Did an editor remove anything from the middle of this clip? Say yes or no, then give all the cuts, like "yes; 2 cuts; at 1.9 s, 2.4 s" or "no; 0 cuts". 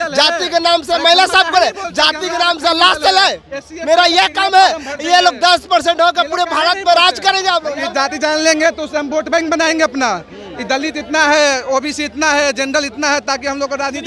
yes; 1 cut; at 7.8 s